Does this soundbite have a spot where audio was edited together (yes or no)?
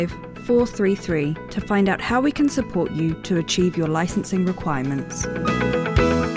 yes